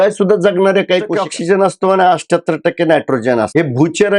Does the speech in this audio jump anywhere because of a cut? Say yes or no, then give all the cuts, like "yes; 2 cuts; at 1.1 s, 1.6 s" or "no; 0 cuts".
yes; 1 cut; at 1.2 s